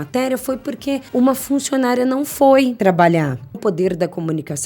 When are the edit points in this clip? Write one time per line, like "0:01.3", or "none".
0:01.1
0:02.8
0:03.6

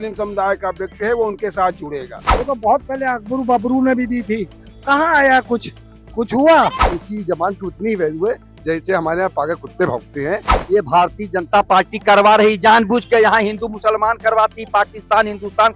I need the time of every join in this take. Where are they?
0:02.3
0:06.9
0:10.5

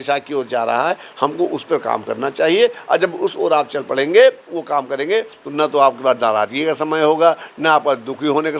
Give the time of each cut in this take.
none

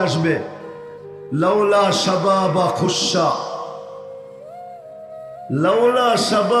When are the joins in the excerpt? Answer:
0:04.1
0:05.4

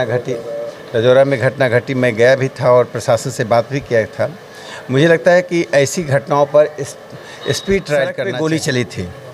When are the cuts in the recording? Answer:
0:08.2

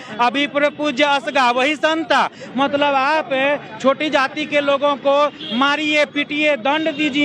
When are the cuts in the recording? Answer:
none

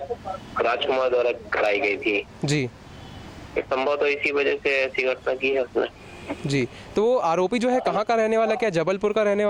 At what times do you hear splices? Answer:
none

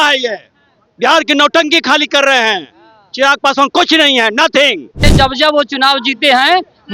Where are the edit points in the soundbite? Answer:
0:05.0

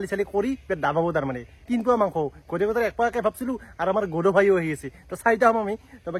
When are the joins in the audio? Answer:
none

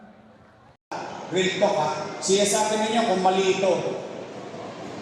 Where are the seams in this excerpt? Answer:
0:01.1

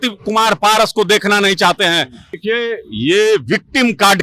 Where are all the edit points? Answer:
0:02.4

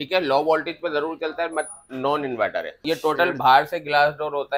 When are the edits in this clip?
0:02.8

